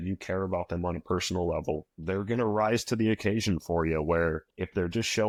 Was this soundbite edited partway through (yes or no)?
no